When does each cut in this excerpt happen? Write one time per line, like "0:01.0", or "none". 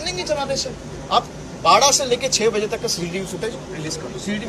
0:00.9